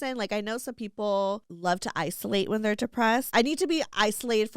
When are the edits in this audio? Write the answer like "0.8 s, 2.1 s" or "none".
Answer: 1.5 s, 3.3 s

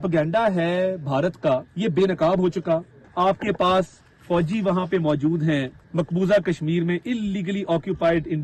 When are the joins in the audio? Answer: 1.7 s, 3.0 s, 5.8 s

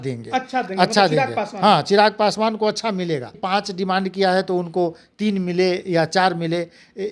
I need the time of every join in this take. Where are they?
3.4 s

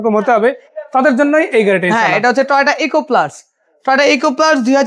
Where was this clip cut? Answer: none

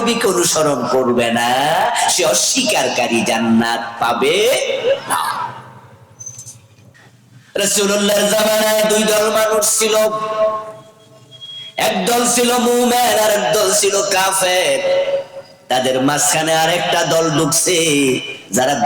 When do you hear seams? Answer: 7.0 s

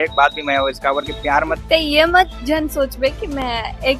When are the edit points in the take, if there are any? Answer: 1.6 s

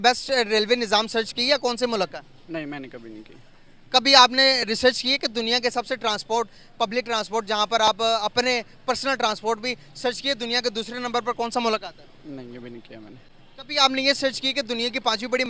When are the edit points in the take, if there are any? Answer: none

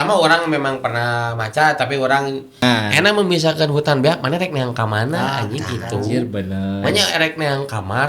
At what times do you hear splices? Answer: 2.6 s

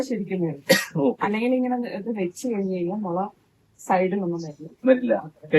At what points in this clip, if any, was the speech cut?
none

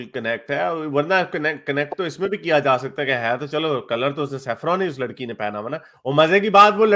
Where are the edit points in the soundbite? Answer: none

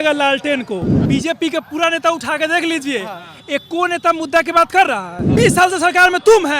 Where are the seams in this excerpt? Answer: 0.9 s, 5.1 s

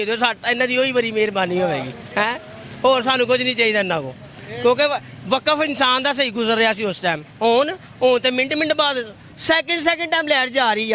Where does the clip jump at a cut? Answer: none

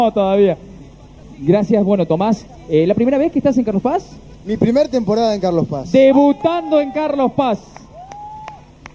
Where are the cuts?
7.6 s

